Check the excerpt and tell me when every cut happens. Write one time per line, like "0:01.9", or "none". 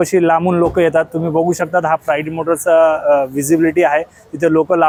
none